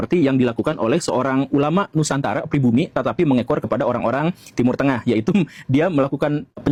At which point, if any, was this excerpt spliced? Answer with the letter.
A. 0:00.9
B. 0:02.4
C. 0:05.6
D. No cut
D